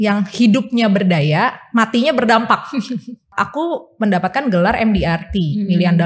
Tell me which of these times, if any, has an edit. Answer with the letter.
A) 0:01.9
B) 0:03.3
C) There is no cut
B